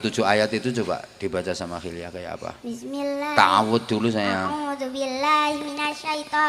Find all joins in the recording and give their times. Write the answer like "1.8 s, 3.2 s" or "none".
none